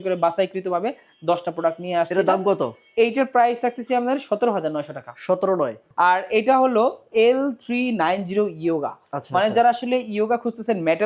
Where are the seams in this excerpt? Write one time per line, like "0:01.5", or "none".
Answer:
0:05.8